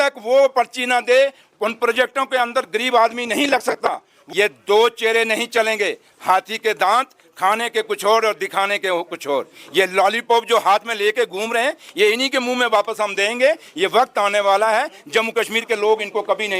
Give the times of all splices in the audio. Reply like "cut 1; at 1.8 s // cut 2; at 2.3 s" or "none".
cut 1; at 4.1 s